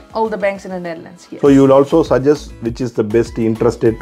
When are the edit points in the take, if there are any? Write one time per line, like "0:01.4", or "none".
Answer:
none